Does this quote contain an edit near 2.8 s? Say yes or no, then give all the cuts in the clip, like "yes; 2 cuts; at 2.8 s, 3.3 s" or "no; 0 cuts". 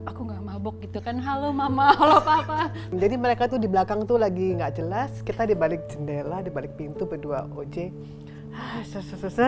yes; 1 cut; at 2.8 s